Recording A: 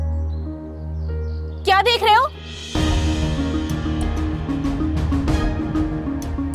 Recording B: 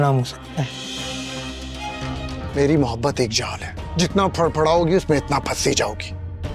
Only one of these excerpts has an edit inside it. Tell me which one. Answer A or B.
B